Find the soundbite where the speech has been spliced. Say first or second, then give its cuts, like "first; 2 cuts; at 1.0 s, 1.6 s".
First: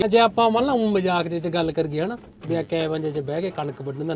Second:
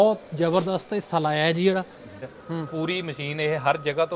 second; 1 cut; at 2.3 s